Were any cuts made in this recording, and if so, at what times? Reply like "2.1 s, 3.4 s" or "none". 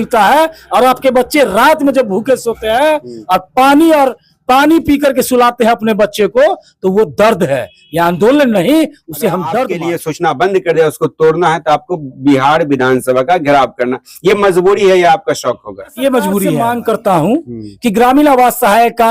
9.8 s, 16.6 s